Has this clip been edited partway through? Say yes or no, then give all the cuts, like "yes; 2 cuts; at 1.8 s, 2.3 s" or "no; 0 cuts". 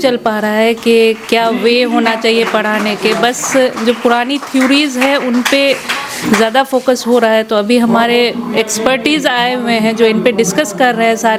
no; 0 cuts